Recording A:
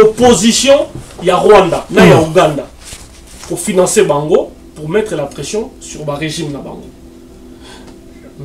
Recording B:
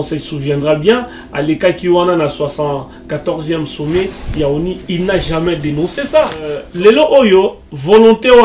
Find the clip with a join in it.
B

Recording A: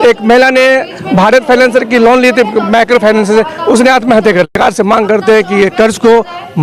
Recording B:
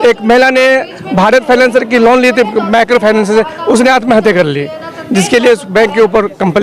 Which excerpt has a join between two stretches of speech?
A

